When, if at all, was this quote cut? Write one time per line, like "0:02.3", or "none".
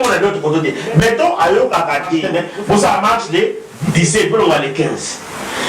0:02.2